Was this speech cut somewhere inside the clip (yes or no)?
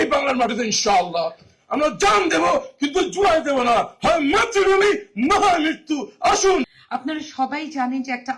yes